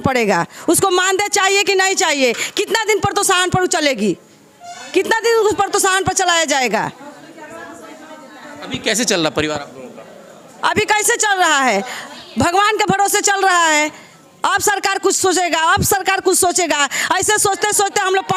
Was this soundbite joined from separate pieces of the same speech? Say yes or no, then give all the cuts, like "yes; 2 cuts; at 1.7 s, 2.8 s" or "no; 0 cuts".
no; 0 cuts